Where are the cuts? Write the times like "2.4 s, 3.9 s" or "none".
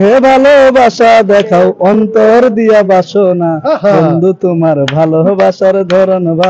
none